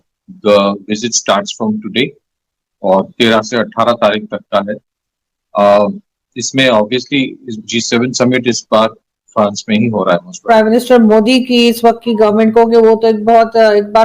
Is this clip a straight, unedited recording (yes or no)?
no